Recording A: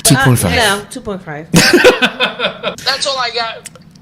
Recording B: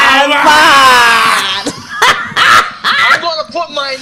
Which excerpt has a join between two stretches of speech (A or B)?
A